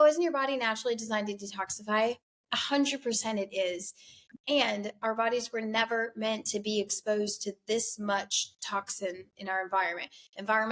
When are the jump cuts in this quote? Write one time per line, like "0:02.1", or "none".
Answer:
none